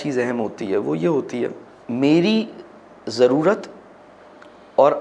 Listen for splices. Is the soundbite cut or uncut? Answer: cut